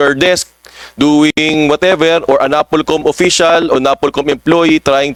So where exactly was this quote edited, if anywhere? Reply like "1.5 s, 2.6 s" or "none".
none